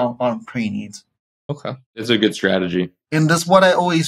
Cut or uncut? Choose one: cut